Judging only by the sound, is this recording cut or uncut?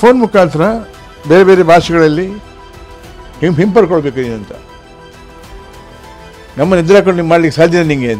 uncut